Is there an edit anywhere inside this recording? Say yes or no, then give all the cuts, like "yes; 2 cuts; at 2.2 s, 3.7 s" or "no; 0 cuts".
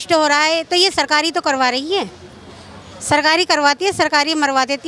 no; 0 cuts